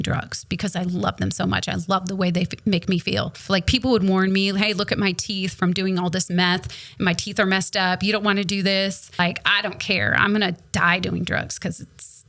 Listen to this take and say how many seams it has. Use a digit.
2